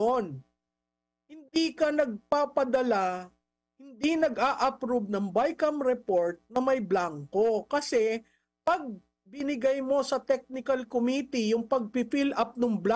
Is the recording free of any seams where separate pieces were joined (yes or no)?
yes